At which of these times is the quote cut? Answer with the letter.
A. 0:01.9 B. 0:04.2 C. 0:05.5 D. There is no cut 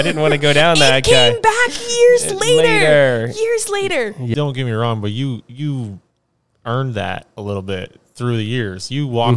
B